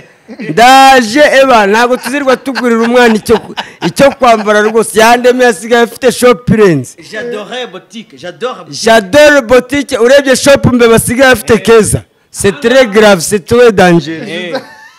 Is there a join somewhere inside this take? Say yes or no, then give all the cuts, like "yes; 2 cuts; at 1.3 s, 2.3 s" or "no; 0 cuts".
no; 0 cuts